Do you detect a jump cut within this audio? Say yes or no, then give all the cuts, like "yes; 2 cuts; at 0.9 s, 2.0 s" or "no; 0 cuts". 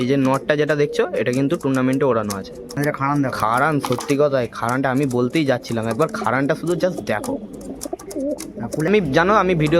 yes; 2 cuts; at 2.8 s, 8.9 s